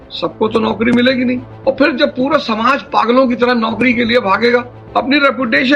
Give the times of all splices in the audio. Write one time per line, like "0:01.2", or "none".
0:01.4
0:04.8